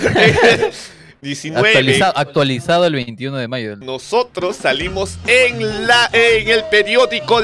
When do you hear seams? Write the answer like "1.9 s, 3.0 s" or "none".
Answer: none